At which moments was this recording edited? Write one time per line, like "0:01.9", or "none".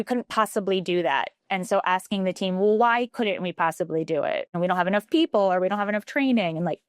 0:04.5